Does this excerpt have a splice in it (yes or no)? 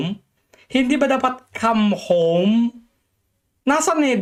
no